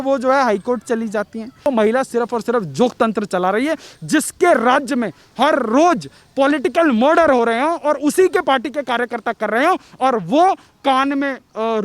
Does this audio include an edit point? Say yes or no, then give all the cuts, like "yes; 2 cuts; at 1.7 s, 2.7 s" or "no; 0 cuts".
yes; 1 cut; at 1.7 s